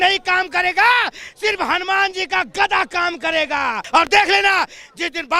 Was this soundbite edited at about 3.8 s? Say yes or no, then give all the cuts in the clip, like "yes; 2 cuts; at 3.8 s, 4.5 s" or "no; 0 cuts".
yes; 1 cut; at 3.8 s